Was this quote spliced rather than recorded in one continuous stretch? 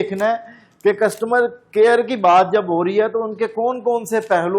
no; 0 cuts

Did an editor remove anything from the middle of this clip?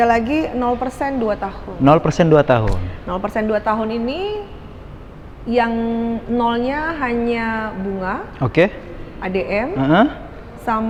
no; 0 cuts

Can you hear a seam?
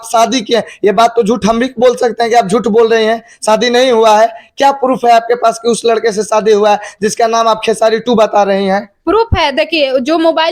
no; 0 cuts

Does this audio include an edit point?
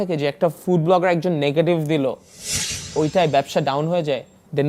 no; 0 cuts

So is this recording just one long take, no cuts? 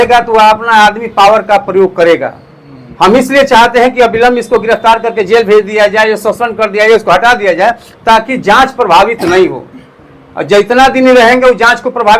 yes; 0 cuts

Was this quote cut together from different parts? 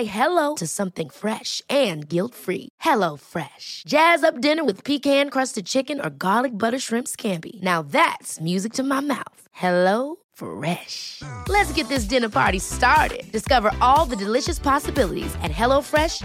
no; 0 cuts

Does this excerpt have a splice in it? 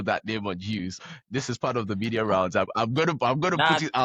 yes; 2 cuts; at 0.9 s, 2.7 s

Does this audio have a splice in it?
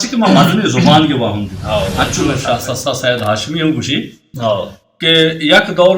yes; 1 cut; at 2.3 s

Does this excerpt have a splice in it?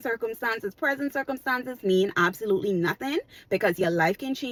no; 0 cuts

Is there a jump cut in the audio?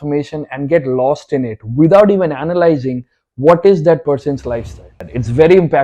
yes; 1 cut; at 4.9 s

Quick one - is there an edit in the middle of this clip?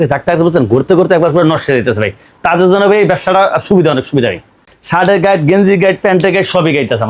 yes; 1 cut; at 4.8 s

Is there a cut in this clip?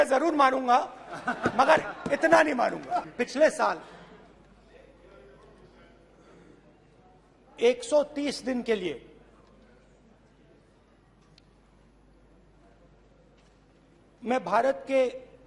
no; 0 cuts

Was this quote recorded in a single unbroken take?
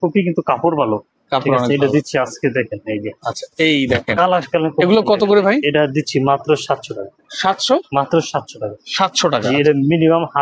yes; 0 cuts

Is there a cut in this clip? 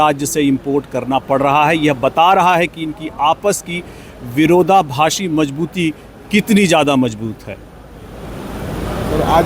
no; 0 cuts

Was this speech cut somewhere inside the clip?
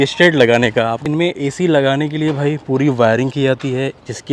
yes; 1 cut; at 1.0 s

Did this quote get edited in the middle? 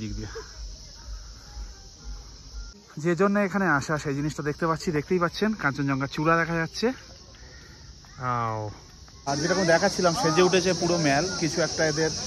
yes; 2 cuts; at 2.8 s, 9.3 s

